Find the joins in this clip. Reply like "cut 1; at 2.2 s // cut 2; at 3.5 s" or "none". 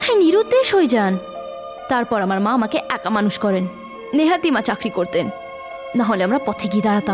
none